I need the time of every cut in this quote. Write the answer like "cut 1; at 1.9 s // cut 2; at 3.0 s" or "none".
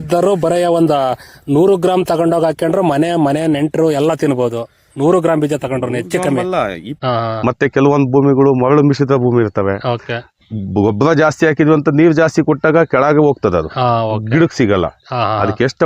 cut 1; at 7.0 s

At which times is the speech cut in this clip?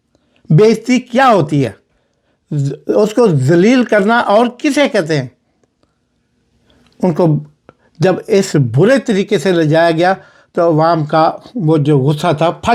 none

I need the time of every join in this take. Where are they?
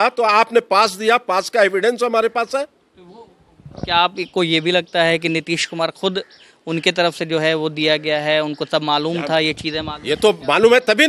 none

